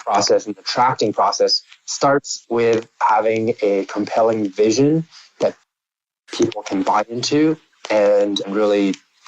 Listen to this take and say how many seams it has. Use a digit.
1